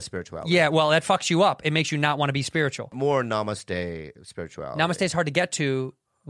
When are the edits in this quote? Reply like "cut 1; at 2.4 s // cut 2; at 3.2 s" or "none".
cut 1; at 2.9 s

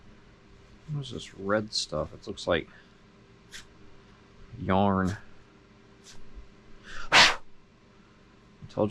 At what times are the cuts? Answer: none

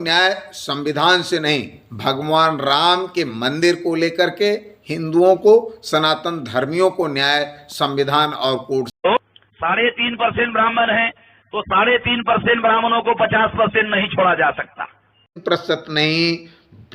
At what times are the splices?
cut 1; at 8.9 s // cut 2; at 15.4 s

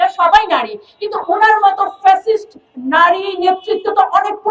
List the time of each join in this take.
none

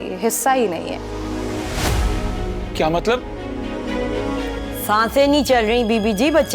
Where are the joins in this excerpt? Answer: cut 1; at 4.7 s

